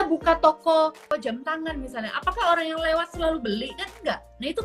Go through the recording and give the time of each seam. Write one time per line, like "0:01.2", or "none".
0:01.1